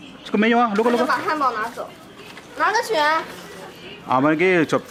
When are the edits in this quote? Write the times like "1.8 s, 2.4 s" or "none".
none